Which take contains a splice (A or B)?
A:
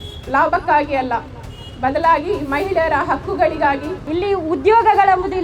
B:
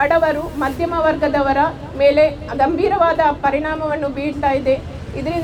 A